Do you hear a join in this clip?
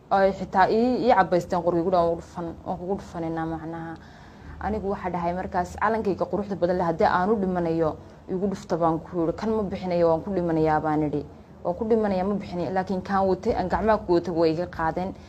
no; 0 cuts

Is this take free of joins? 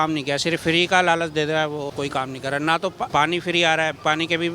no; 2 cuts; at 1.9 s, 3.1 s

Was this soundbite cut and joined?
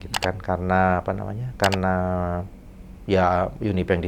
no; 0 cuts

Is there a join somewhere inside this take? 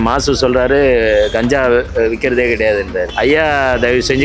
no; 0 cuts

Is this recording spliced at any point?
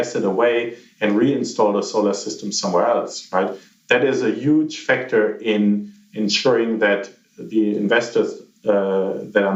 no; 0 cuts

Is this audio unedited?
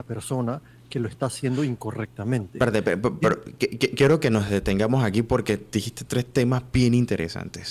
yes; 0 cuts

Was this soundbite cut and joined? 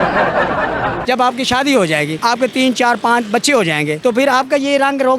yes; 1 cut; at 1.0 s

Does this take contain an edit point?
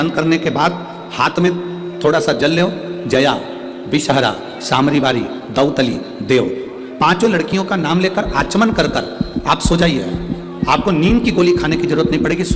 no; 0 cuts

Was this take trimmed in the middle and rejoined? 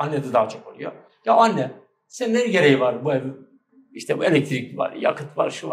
no; 0 cuts

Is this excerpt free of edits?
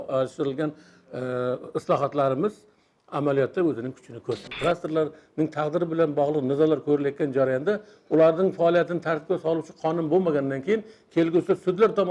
no; 1 cut; at 4.5 s

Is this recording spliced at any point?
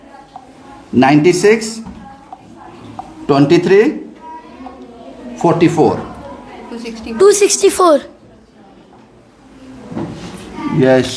no; 0 cuts

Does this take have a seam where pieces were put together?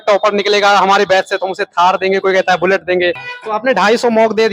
yes; 1 cut; at 3.3 s

